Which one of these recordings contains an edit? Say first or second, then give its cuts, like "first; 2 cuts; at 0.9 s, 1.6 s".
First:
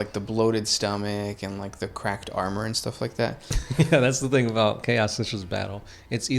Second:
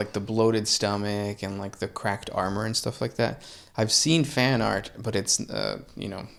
first; 1 cut; at 3.6 s